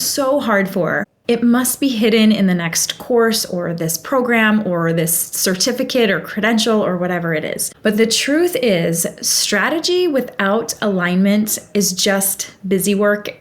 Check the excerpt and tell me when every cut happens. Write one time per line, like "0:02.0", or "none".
0:01.1
0:07.6